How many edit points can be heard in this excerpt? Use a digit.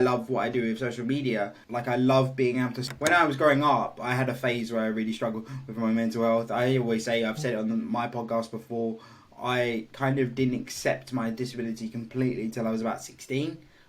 1